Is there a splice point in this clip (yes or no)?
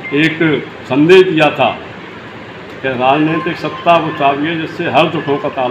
no